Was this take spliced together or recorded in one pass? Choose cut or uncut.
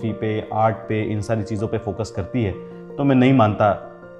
uncut